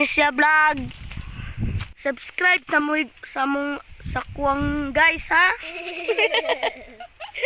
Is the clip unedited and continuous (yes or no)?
no